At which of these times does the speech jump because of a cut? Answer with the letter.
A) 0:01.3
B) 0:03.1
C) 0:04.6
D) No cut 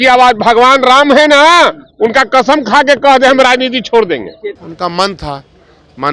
C